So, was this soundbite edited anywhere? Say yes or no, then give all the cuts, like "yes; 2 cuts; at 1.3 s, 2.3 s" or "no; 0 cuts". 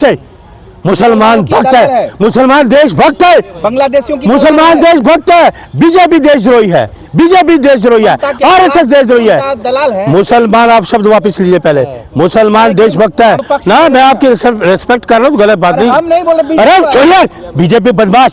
no; 0 cuts